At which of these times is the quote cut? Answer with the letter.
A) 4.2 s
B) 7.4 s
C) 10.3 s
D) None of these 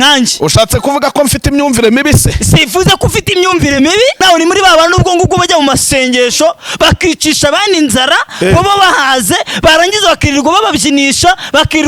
A